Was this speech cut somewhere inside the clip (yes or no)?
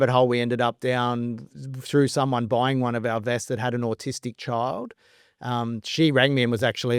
no